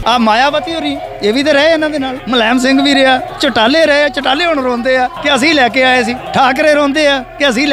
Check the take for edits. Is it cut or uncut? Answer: cut